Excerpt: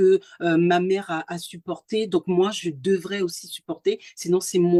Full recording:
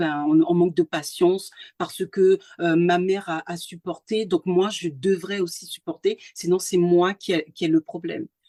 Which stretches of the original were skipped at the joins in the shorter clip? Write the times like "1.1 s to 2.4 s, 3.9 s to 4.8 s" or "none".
none